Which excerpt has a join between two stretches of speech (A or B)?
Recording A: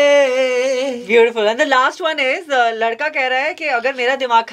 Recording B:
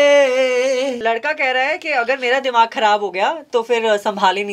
B